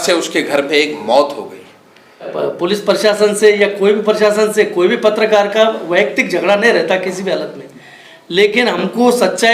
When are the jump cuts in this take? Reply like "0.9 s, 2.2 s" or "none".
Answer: 2.3 s